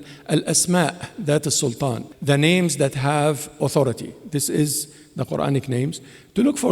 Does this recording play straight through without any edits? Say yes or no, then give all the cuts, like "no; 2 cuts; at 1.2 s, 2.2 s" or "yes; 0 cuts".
no; 1 cut; at 2.1 s